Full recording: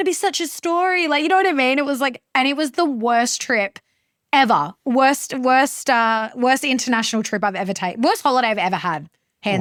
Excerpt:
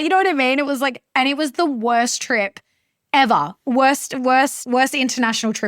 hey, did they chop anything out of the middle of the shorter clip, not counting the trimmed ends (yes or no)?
yes